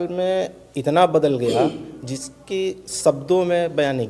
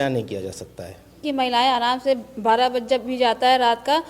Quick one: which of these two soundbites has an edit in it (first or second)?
second